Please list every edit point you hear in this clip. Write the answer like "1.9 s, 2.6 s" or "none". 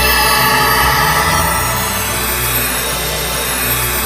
2.1 s